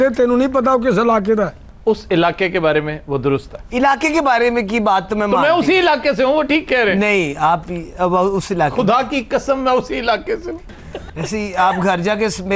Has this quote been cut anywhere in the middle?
yes; 2 cuts; at 1.7 s, 10.6 s

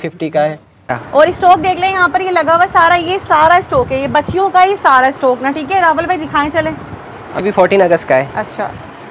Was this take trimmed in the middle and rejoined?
yes; 2 cuts; at 0.9 s, 7.4 s

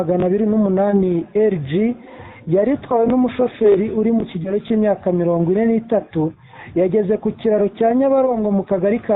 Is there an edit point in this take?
no; 0 cuts

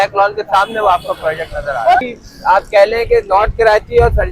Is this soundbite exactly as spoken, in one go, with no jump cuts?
no; 1 cut; at 2.0 s

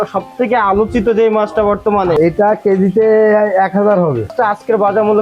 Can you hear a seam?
yes; 2 cuts; at 2.1 s, 4.3 s

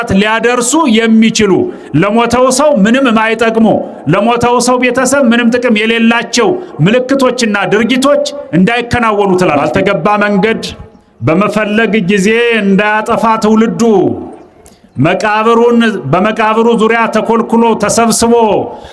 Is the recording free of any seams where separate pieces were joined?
no; 1 cut; at 9.6 s

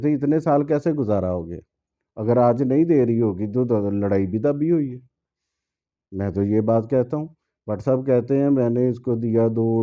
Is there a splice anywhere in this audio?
no; 0 cuts

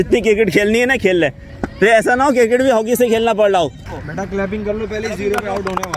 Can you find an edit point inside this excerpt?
yes; 2 cuts; at 1.5 s, 3.8 s

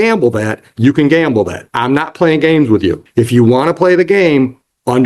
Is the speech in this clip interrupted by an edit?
yes; 2 cuts; at 1.6 s, 3.0 s

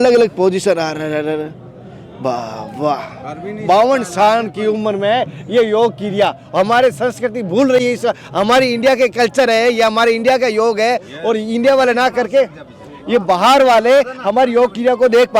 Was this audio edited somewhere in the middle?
no; 0 cuts

